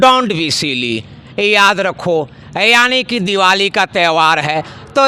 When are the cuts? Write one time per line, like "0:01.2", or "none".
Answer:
none